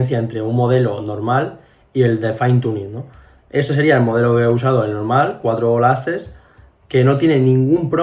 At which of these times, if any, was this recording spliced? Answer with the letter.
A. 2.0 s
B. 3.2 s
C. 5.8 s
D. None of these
D